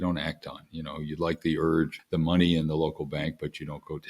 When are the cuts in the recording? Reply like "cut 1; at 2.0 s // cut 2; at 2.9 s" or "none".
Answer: cut 1; at 2.0 s